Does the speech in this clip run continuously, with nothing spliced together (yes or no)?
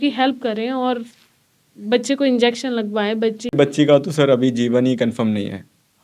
no